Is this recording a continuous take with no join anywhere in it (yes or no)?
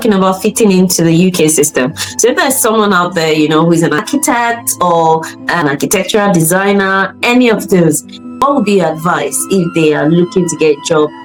yes